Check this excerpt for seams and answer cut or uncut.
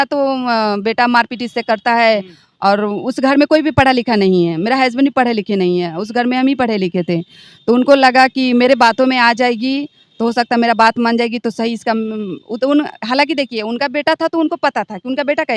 uncut